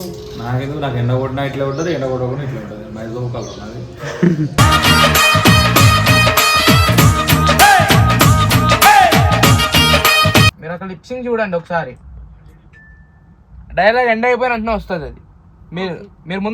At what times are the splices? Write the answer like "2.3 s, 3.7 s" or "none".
10.6 s